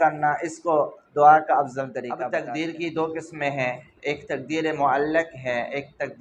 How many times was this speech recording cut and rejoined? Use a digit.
1